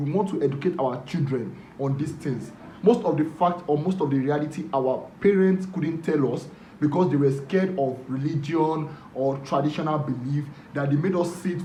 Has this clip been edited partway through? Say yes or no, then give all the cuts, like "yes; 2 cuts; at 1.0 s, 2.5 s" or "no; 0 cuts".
no; 0 cuts